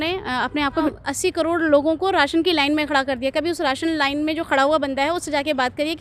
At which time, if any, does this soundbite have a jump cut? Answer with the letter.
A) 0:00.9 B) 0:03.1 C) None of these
A